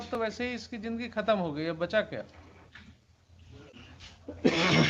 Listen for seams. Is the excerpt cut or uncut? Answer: uncut